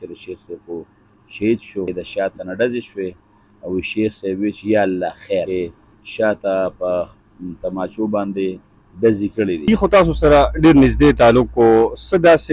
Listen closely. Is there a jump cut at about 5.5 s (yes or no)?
yes